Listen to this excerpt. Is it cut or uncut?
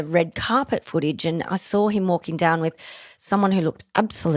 uncut